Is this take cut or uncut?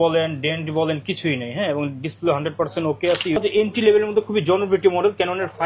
cut